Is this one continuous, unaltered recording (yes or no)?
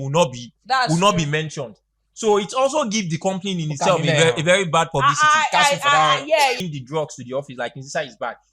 no